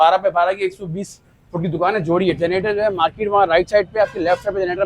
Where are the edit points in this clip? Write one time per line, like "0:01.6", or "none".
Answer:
0:02.4